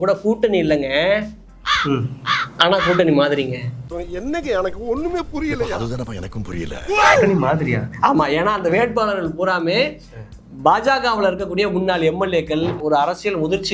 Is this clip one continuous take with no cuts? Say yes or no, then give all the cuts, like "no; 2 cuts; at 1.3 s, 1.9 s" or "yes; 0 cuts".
no; 1 cut; at 12.8 s